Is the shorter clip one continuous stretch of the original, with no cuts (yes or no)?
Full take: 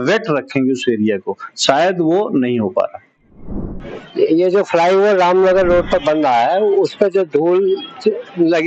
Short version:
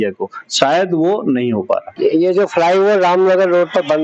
no